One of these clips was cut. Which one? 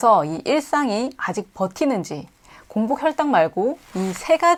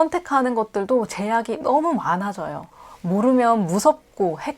second; 1 cut; at 2.7 s

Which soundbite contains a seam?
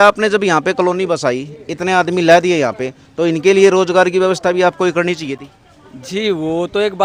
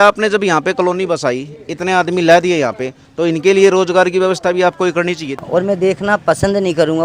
second; 1 cut; at 5.4 s

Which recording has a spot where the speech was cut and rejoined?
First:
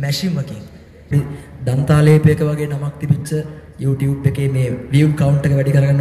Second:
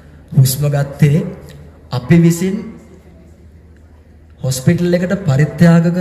first; 1 cut; at 1.1 s

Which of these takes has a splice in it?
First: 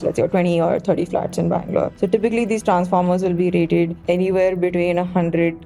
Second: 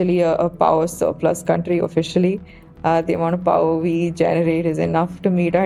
first; 2 cuts; at 1.9 s, 4.0 s

